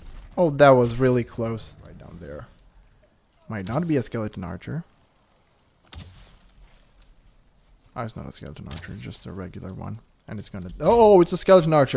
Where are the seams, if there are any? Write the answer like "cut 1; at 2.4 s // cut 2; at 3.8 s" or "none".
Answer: cut 1; at 2.0 s